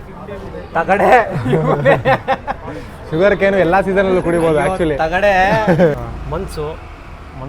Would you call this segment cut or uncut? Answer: cut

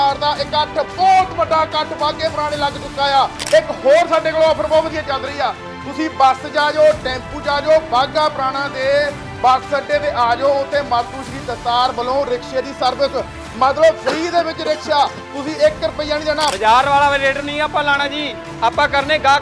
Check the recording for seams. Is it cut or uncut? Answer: cut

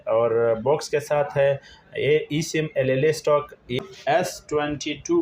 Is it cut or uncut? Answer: cut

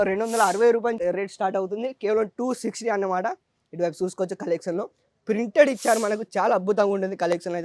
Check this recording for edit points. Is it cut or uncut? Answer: cut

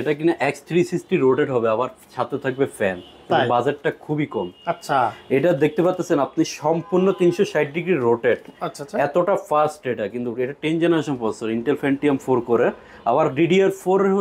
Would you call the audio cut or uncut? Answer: uncut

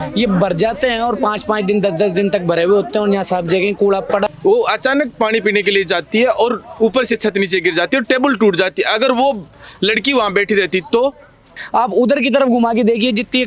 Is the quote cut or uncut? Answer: cut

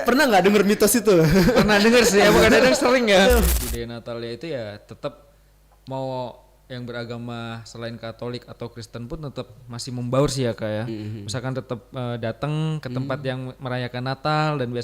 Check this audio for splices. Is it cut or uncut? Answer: cut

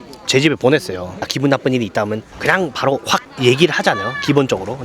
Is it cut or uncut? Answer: cut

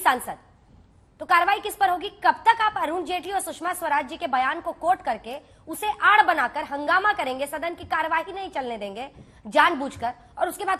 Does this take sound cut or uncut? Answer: uncut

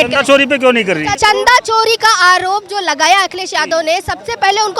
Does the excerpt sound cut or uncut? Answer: cut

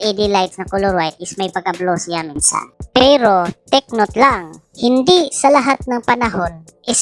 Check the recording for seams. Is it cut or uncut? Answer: uncut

